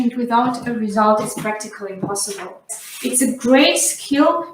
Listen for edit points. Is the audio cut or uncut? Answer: cut